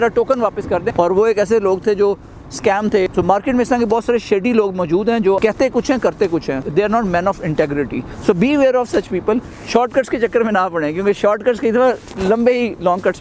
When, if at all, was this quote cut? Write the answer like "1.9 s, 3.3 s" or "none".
0.9 s, 3.1 s, 5.4 s, 6.6 s, 8.1 s, 9.5 s